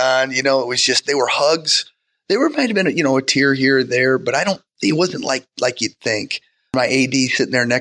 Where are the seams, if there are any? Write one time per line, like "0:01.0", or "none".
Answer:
0:06.7